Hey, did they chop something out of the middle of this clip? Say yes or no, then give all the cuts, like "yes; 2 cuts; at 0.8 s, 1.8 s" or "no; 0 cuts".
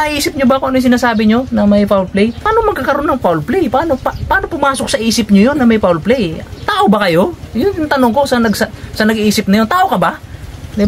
yes; 1 cut; at 2.4 s